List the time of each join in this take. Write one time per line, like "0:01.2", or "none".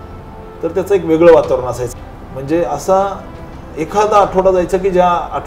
0:01.8